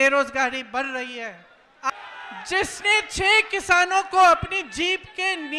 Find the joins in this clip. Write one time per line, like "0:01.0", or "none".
0:01.9